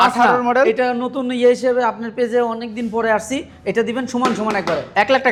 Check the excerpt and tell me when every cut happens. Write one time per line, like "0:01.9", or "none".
none